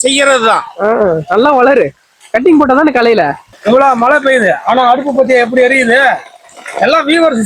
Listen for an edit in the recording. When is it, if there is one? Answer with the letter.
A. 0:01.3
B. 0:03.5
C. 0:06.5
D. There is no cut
B